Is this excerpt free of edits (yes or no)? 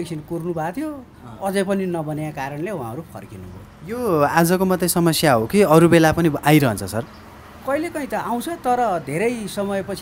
yes